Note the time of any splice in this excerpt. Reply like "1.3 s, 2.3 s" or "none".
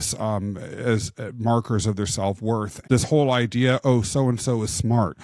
2.7 s